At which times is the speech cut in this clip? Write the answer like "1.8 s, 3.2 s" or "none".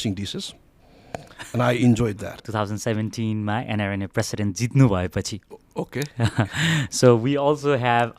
2.5 s

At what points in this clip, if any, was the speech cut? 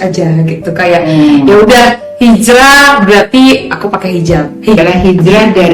4.8 s

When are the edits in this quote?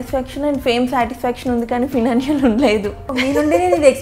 3.1 s

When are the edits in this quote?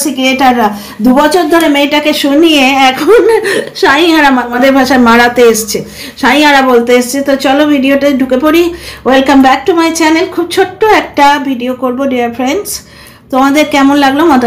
4.5 s

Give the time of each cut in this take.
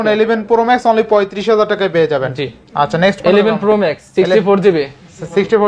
none

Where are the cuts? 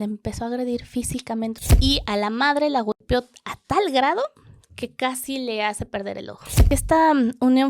1.6 s, 6.6 s

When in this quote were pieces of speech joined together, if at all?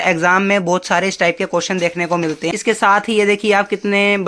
2.5 s

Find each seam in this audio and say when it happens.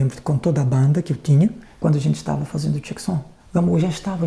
1.7 s, 3.4 s

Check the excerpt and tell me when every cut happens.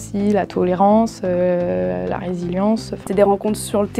2.9 s

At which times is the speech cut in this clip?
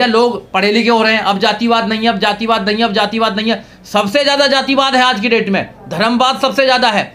none

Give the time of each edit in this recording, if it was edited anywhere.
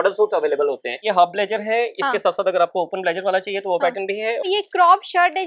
1.0 s, 4.4 s

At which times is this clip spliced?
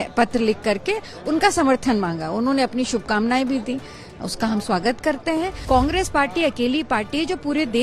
5.6 s

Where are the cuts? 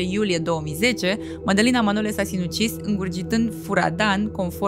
none

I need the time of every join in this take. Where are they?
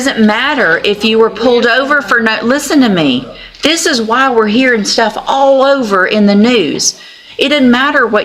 none

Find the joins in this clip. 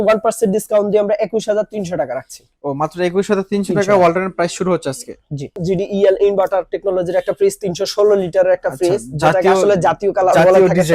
5.6 s

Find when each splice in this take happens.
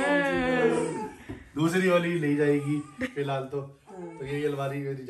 none

